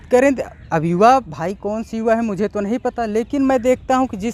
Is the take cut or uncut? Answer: uncut